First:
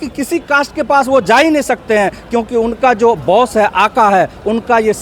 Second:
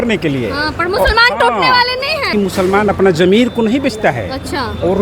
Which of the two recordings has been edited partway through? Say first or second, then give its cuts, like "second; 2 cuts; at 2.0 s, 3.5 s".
second; 1 cut; at 2.3 s